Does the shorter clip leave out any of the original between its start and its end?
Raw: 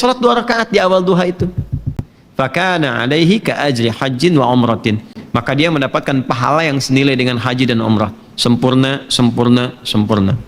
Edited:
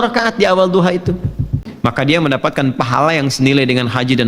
yes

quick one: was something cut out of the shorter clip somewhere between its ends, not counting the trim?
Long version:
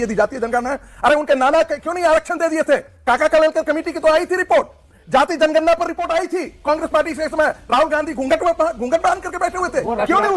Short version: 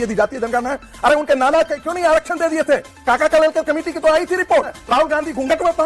yes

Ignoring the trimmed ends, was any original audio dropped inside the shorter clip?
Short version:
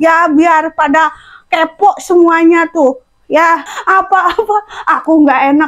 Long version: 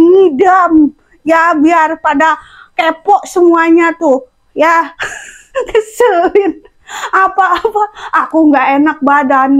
yes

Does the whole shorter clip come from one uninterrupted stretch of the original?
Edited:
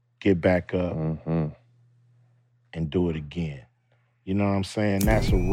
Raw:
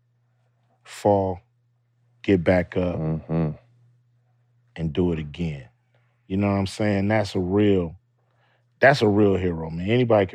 yes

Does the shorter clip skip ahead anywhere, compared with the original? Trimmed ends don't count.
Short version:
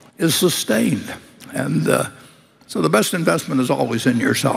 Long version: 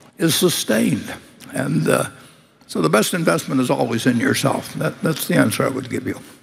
no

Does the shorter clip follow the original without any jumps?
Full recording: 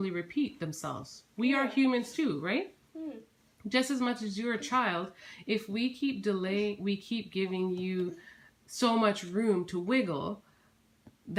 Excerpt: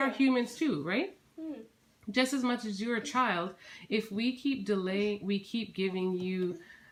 yes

